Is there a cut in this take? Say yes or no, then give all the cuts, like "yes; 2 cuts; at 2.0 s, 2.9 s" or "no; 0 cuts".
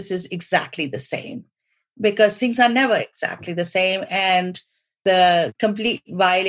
yes; 2 cuts; at 5.0 s, 5.5 s